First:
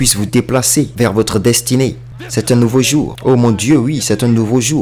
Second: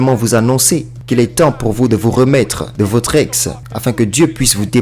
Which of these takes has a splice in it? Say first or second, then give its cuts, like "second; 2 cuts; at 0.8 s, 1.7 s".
second; 1 cut; at 1.0 s